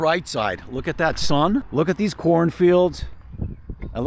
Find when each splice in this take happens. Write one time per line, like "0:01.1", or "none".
0:01.7